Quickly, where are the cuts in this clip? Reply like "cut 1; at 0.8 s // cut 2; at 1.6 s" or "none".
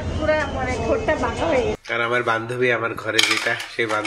cut 1; at 1.8 s